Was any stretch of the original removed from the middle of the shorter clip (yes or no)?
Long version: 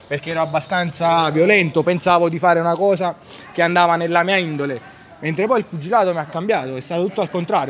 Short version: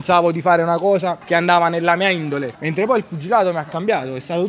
yes